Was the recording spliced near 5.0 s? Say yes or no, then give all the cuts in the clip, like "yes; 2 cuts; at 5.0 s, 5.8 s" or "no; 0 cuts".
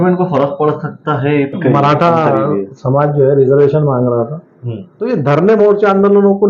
yes; 2 cuts; at 1.5 s, 5.0 s